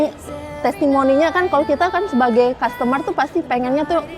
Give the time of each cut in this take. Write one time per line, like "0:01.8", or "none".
none